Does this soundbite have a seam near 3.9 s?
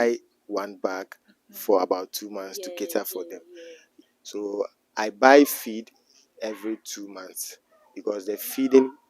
yes; 1 cut; at 3.9 s

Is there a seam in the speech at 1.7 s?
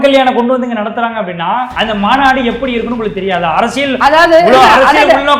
yes; 1 cut; at 1.7 s

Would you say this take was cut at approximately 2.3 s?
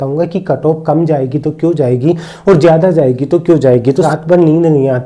no; 1 cut; at 4.1 s

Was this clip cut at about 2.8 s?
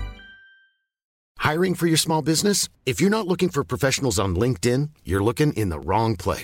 no; 1 cut; at 1.1 s

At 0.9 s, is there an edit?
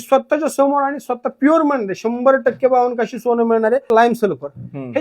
no; 1 cut; at 3.8 s

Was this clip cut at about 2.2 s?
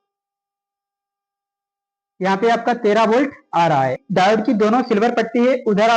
no; 1 cut; at 4.0 s

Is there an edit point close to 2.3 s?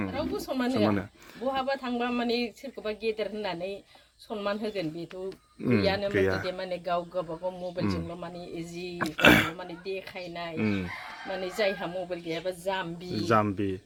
no; 0 cuts

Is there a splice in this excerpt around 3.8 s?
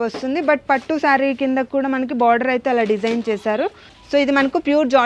yes; 1 cut; at 3.8 s

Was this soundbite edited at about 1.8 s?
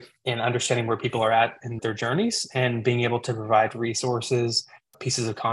yes; 1 cut; at 1.8 s

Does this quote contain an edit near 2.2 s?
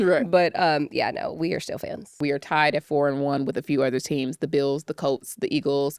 yes; 1 cut; at 2.2 s

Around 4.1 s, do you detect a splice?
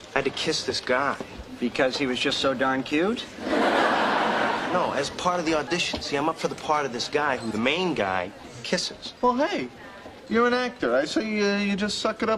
yes; 2 cuts; at 4.1 s, 7.7 s

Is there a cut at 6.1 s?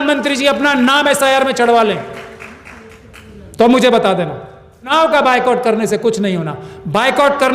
no; 1 cut; at 4.9 s

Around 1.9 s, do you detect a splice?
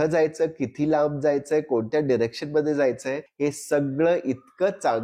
no; 1 cut; at 3.2 s

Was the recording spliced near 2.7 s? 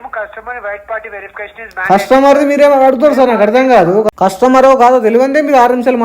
no; 1 cut; at 4.1 s

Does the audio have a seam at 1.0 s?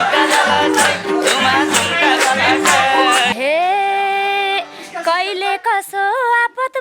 no; 1 cut; at 3.3 s

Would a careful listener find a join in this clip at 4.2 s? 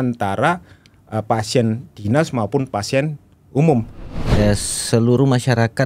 yes; 1 cut; at 4.2 s

